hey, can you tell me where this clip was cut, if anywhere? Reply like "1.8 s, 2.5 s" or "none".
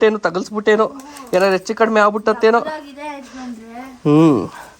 none